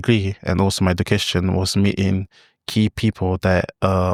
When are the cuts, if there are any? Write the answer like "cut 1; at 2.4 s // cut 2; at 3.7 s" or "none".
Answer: none